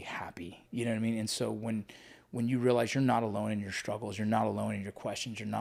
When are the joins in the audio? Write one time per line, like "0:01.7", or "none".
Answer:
none

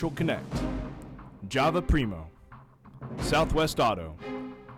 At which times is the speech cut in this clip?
none

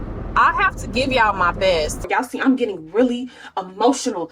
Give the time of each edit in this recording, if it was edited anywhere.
0:02.1

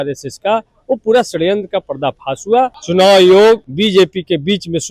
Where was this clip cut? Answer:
0:02.8
0:03.7

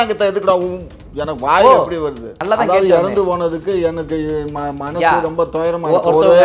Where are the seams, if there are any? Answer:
0:02.3

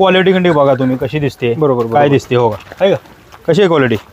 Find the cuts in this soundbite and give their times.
none

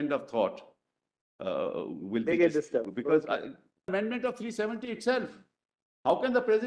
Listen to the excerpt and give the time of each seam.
0:03.9

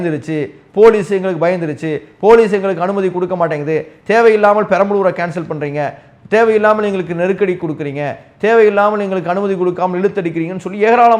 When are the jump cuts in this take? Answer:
none

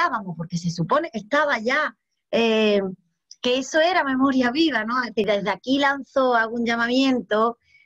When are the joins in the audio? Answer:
0:05.2

